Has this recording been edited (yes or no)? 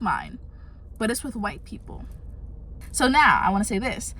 yes